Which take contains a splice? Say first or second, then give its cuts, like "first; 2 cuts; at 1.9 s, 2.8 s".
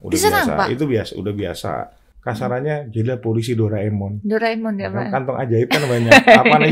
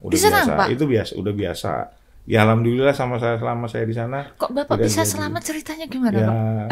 first; 1 cut; at 2.1 s